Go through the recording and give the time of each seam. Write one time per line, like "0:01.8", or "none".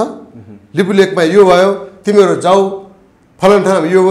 none